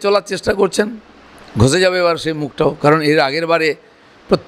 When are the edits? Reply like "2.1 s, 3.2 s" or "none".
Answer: none